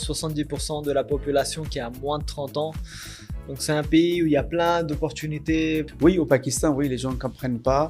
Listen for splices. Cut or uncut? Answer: cut